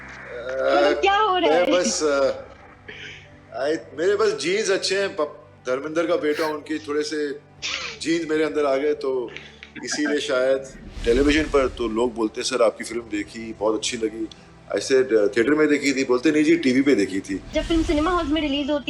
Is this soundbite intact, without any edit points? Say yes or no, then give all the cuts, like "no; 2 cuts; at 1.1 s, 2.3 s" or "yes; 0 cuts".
no; 2 cuts; at 10.9 s, 17.4 s